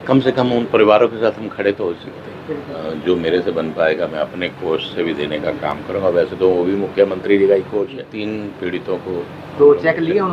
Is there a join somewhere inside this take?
yes; 2 cuts; at 2.8 s, 8.0 s

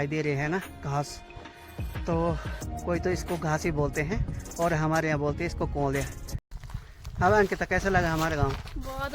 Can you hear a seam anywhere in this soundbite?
yes; 1 cut; at 6.4 s

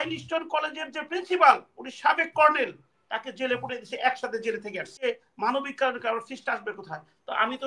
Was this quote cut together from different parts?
yes; 1 cut; at 5.0 s

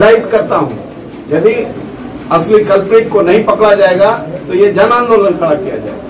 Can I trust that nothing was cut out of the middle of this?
yes; 0 cuts

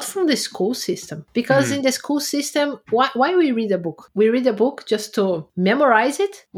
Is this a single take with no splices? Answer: yes; 0 cuts

